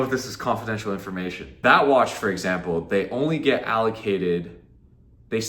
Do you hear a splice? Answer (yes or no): no